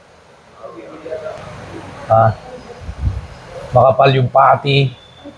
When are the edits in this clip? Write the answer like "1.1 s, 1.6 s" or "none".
1.1 s